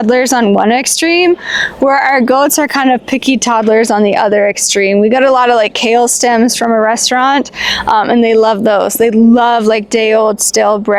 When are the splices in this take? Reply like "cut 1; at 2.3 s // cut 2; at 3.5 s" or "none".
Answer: none